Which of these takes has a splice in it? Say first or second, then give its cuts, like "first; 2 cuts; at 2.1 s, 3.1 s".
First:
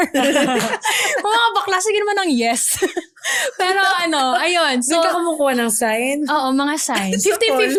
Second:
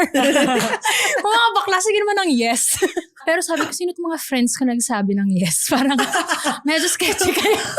second; 1 cut; at 3.2 s